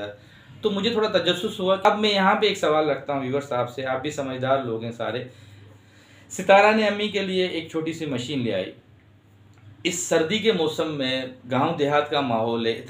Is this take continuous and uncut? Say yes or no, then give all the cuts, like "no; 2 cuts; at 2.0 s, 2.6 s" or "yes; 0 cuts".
no; 1 cut; at 1.8 s